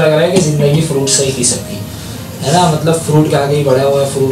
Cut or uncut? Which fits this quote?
uncut